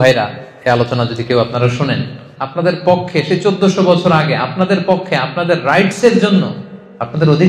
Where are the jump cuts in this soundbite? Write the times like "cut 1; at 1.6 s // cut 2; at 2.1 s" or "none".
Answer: cut 1; at 2.3 s